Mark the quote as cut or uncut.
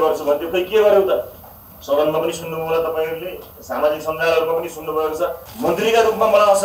cut